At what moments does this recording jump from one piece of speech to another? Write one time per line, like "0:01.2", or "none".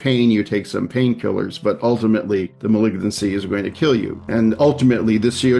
0:02.5
0:04.2

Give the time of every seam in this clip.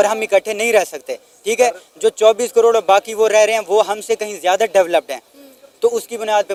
none

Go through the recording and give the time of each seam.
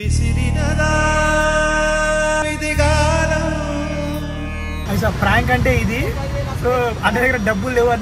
0:04.8

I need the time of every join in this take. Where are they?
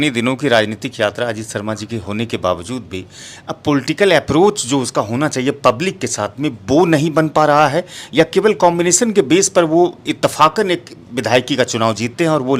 none

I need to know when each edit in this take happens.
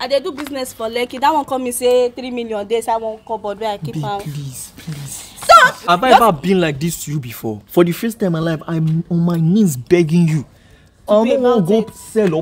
0:05.8
0:11.0

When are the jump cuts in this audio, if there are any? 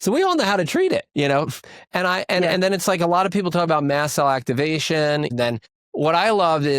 0:01.1
0:05.3

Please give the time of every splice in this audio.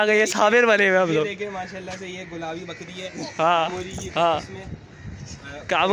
none

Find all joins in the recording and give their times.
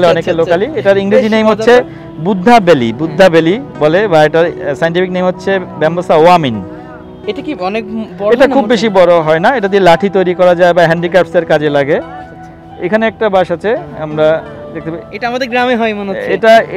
none

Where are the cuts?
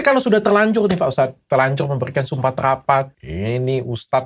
0:03.1

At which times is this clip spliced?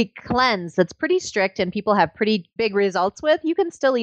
0:02.5

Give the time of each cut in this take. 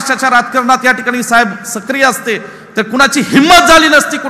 none

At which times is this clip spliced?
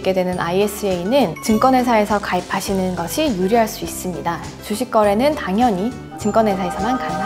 none

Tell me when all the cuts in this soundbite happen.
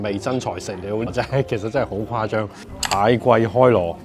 0:02.6

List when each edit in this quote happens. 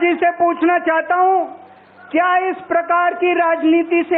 none

